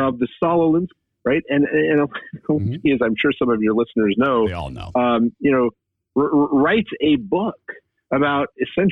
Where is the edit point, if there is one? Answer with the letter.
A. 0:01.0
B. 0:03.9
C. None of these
A